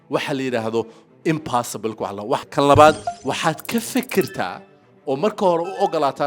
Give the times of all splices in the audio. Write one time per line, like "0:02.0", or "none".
0:02.5